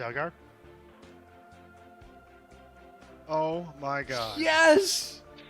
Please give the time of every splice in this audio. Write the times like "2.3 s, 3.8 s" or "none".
0.9 s